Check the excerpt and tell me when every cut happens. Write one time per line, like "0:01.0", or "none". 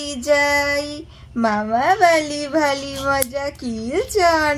none